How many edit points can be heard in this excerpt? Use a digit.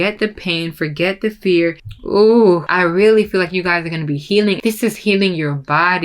3